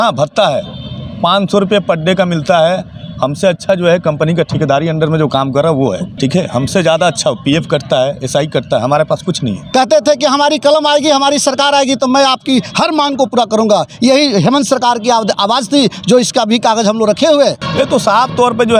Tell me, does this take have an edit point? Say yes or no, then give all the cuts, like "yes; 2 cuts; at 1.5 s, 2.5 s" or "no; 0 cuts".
yes; 3 cuts; at 6.1 s, 9.6 s, 17.6 s